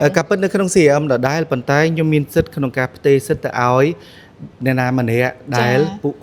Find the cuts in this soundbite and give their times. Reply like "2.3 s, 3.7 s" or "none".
none